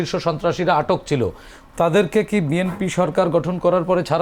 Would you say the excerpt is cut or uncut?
uncut